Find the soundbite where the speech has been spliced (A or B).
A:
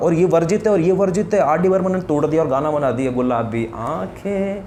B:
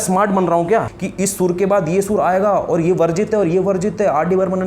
B